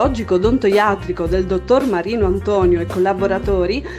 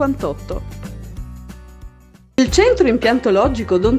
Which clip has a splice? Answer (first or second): second